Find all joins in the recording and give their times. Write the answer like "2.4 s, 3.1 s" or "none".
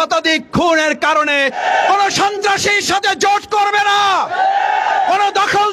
1.6 s